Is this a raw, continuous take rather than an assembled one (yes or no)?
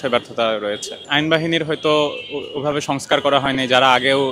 yes